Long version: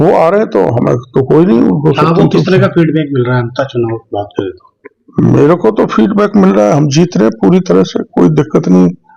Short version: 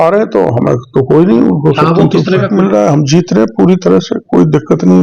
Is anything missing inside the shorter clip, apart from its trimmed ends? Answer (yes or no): yes